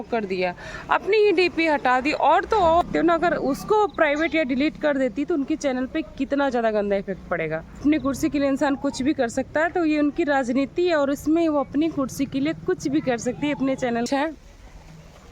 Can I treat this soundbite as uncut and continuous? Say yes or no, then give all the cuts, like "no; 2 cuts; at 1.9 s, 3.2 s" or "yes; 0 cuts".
no; 3 cuts; at 2.8 s, 7.8 s, 14.1 s